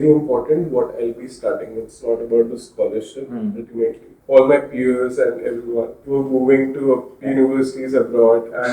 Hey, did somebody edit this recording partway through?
yes; 3 cuts; at 4.1 s, 6.0 s, 7.1 s

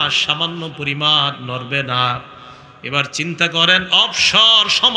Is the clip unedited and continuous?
yes; 0 cuts

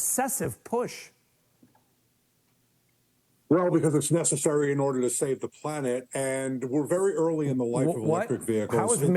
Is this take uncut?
yes; 0 cuts

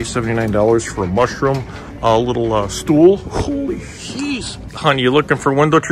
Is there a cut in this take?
no; 0 cuts

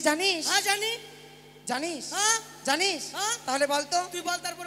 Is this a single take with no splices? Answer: yes; 0 cuts

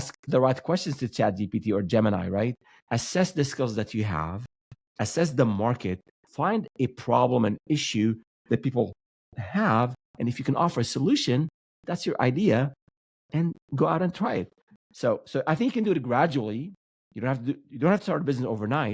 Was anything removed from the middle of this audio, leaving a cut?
yes; 1 cut; at 2.7 s

